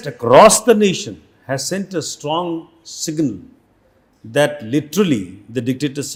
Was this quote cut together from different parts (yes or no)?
no